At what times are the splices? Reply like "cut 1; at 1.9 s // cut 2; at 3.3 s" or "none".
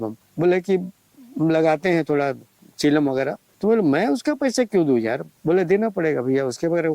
cut 1; at 3.4 s // cut 2; at 5.3 s